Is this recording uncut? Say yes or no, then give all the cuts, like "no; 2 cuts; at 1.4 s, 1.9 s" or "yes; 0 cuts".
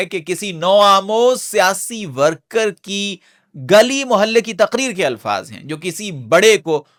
yes; 0 cuts